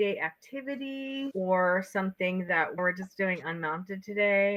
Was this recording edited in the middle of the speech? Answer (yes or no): no